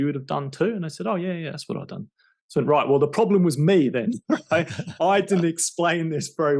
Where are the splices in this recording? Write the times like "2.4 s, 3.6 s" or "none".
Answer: none